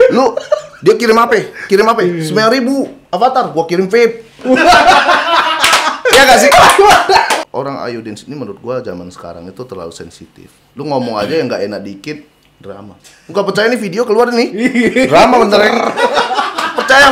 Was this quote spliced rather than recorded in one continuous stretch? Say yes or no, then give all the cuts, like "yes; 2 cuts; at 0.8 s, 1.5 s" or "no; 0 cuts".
yes; 1 cut; at 7.4 s